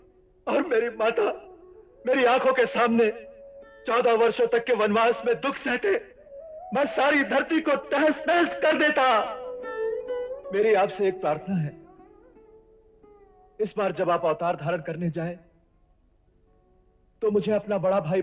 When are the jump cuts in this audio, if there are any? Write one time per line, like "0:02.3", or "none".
0:10.4